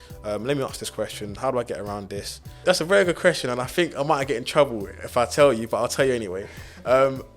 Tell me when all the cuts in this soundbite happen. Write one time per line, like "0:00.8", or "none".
0:02.6